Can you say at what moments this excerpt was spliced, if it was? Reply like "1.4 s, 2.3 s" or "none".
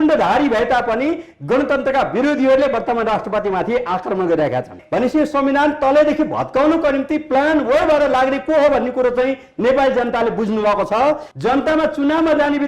4.8 s, 11.3 s